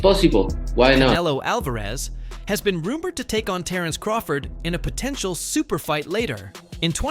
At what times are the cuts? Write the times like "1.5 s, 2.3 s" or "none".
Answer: 1.2 s